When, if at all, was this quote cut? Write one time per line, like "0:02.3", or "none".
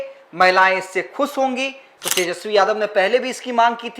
0:01.9